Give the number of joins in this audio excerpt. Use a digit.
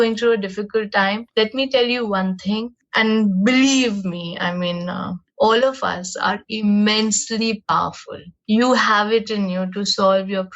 2